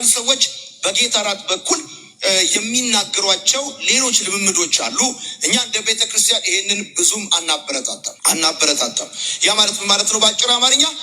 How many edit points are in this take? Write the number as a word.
one